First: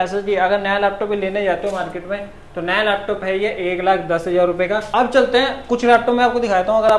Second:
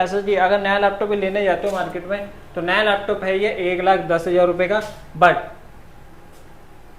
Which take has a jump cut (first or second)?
first